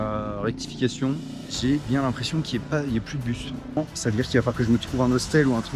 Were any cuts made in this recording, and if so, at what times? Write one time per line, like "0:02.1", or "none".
0:01.4
0:03.8